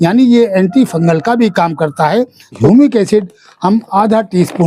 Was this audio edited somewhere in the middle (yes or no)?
yes